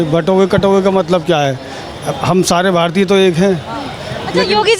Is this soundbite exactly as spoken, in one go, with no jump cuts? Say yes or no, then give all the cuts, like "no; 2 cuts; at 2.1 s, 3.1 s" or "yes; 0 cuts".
yes; 0 cuts